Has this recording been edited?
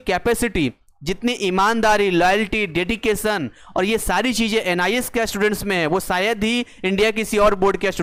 no; 0 cuts

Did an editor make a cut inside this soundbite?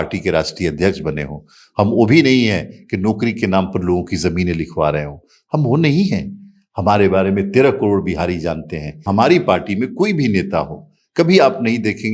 yes; 1 cut; at 9.0 s

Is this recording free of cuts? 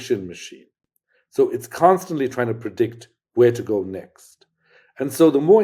yes; 0 cuts

